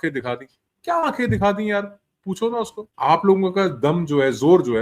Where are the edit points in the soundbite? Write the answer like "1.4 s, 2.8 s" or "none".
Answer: 2.8 s